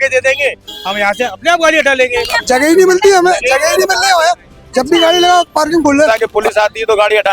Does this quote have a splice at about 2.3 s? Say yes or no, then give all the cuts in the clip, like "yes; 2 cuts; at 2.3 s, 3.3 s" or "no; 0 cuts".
yes; 2 cuts; at 2.3 s, 6.1 s